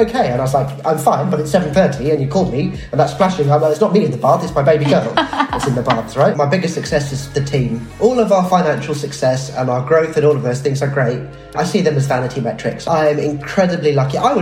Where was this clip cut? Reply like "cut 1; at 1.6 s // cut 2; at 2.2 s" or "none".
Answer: cut 1; at 6.3 s // cut 2; at 7.9 s // cut 3; at 11.6 s